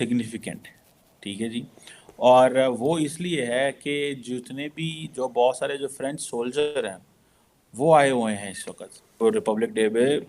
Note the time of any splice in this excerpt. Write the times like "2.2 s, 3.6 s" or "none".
9.2 s